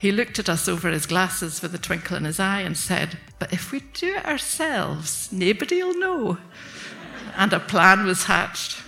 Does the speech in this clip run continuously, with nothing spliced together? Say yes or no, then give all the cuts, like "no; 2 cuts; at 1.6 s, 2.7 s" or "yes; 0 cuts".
no; 1 cut; at 3.2 s